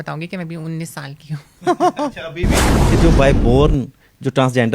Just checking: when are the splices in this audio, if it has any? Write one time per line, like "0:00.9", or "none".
0:02.7